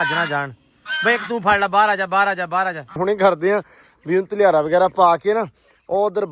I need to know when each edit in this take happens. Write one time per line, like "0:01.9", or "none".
0:03.0